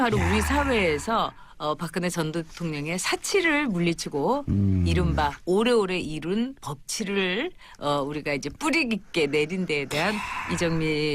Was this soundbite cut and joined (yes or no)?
yes